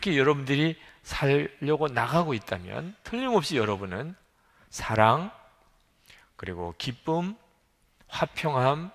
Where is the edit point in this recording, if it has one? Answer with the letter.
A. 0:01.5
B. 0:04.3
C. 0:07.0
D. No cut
D